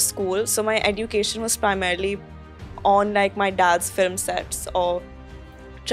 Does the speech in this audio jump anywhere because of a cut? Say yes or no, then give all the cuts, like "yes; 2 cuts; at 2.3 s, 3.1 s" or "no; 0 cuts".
no; 0 cuts